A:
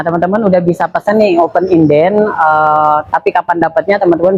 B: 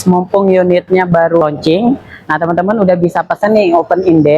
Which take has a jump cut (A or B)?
B